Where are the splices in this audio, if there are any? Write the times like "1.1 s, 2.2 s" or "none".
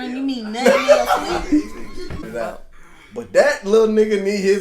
2.3 s